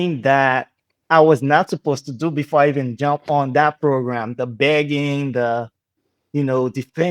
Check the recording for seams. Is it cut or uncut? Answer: uncut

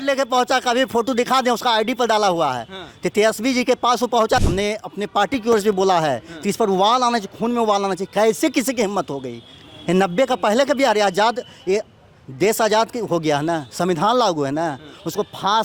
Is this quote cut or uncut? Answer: cut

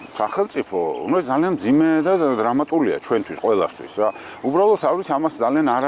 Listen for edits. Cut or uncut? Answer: uncut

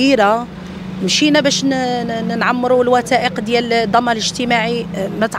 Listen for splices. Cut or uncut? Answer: uncut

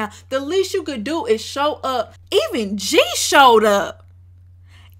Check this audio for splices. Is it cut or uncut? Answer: cut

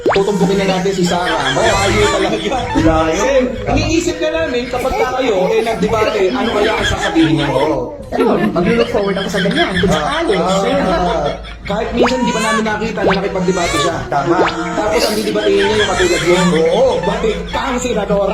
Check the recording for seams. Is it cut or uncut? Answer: uncut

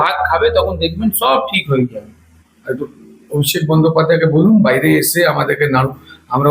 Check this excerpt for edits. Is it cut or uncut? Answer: cut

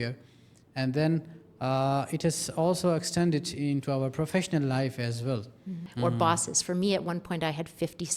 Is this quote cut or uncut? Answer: cut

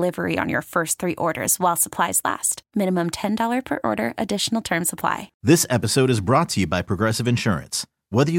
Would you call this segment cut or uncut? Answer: cut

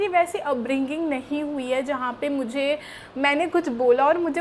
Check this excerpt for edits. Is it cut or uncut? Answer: uncut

